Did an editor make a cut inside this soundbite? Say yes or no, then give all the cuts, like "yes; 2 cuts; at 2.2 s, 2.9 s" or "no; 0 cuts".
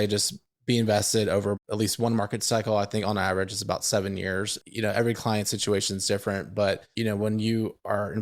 yes; 3 cuts; at 1.6 s, 4.6 s, 6.9 s